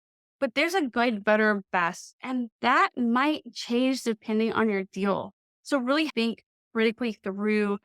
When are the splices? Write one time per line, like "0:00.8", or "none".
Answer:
0:06.1